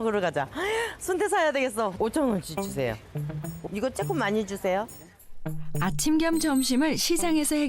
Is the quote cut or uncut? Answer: cut